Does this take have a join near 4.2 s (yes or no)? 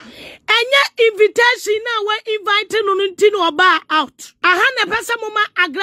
yes